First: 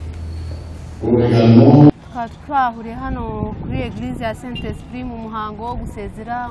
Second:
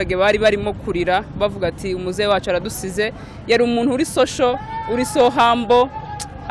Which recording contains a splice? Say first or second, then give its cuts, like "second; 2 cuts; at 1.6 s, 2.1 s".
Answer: first; 1 cut; at 1.9 s